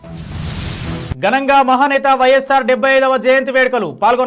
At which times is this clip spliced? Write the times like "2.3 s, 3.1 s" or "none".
none